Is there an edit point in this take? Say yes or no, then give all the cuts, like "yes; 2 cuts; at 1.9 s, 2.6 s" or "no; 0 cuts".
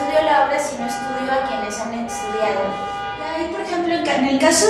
no; 0 cuts